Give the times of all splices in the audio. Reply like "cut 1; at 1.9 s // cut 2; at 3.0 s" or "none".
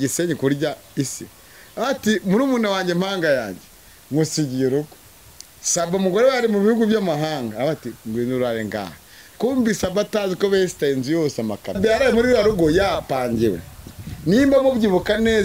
cut 1; at 11.8 s